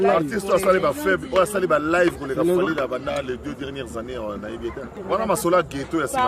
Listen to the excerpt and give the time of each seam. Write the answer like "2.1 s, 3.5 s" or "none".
5.0 s